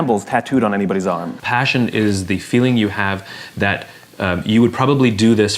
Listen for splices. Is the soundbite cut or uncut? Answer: cut